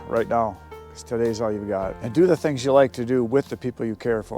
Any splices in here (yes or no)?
yes